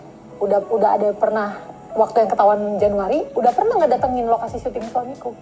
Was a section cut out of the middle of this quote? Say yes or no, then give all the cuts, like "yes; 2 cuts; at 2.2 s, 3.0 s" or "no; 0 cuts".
no; 0 cuts